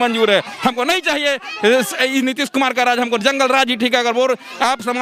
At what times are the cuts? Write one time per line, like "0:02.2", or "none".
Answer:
none